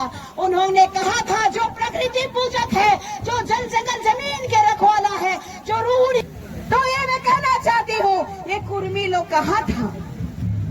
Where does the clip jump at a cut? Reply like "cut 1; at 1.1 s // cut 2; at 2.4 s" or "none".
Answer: cut 1; at 6.2 s